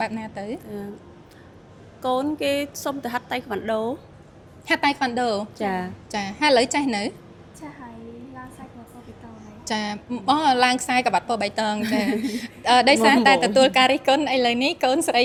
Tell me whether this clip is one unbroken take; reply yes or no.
yes